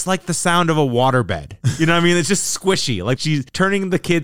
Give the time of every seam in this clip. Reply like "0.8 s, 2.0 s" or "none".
3.2 s